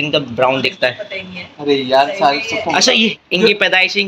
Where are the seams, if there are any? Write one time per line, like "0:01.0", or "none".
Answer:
0:03.2